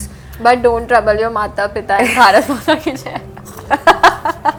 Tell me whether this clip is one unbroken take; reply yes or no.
yes